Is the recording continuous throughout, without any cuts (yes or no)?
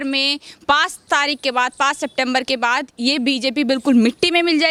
yes